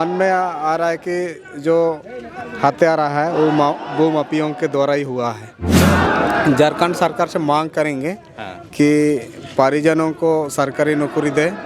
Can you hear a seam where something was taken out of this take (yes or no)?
yes